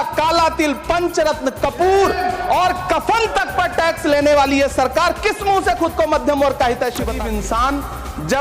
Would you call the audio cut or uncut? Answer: cut